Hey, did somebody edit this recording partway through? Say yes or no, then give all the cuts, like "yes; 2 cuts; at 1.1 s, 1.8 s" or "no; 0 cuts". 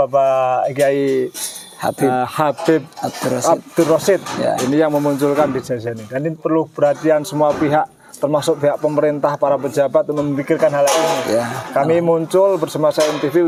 no; 0 cuts